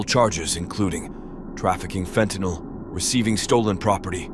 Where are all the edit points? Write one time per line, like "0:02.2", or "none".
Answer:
none

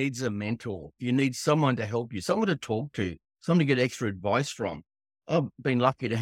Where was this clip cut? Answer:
0:00.9
0:05.2

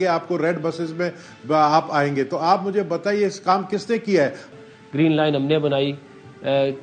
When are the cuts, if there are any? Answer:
0:04.5

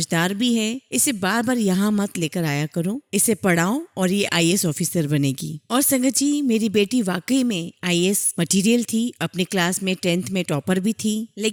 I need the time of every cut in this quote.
none

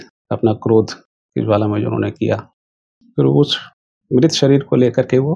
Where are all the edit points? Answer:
none

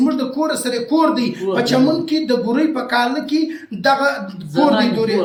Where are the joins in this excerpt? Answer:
none

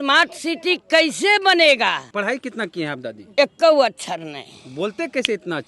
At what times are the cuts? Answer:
0:02.1

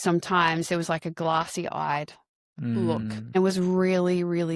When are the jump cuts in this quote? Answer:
0:03.4

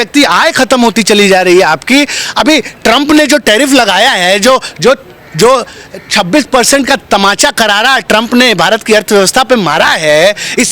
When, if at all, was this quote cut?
none

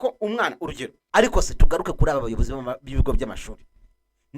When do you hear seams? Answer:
0:00.9

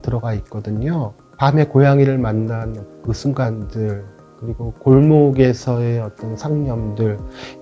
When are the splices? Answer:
0:01.2

